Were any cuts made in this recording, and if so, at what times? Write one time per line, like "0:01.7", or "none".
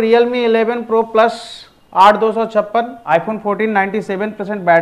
0:03.0